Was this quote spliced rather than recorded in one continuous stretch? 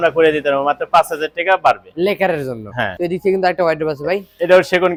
no; 0 cuts

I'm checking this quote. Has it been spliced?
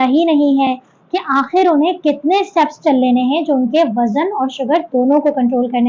no; 0 cuts

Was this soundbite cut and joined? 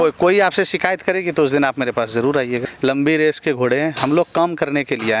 yes; 1 cut; at 2.7 s

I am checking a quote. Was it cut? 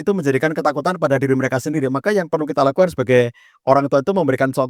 no; 0 cuts

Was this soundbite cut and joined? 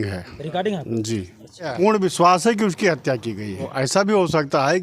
yes; 2 cuts; at 1.7 s, 3.7 s

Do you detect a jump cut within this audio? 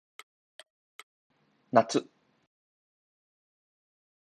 no; 0 cuts

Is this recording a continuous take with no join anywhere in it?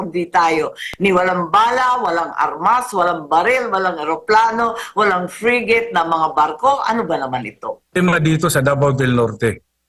no; 1 cut; at 8.0 s

